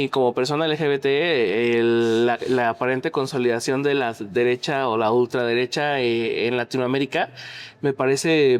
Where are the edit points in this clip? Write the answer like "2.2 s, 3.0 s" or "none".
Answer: none